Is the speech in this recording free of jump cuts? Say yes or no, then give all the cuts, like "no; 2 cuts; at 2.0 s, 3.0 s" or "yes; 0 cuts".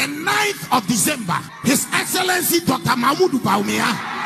no; 1 cut; at 1.5 s